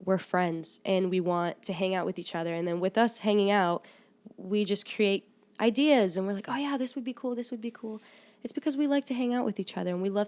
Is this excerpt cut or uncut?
uncut